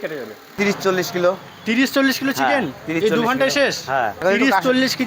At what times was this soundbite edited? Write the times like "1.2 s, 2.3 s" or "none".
0.8 s, 4.1 s

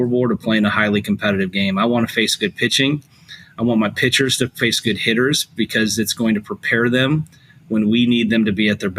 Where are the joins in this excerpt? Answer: none

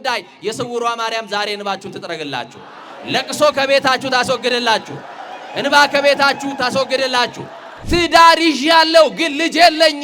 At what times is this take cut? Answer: 7.8 s

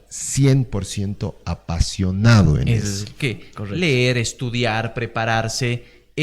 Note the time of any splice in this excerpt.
3.6 s

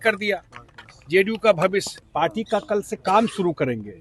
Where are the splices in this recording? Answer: 2.0 s

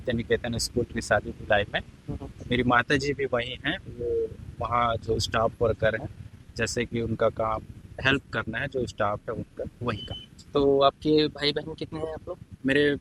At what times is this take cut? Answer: none

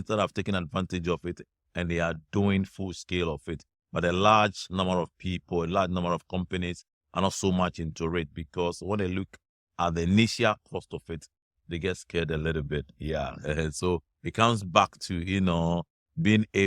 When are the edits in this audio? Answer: none

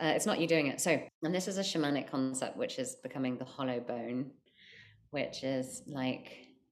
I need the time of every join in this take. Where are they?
1.1 s

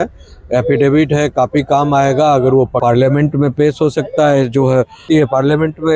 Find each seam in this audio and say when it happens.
2.8 s, 5.0 s

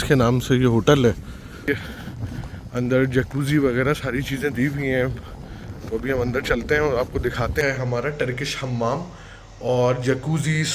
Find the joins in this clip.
1.7 s, 7.6 s

